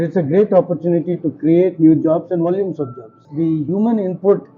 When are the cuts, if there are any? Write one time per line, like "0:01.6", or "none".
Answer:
0:03.2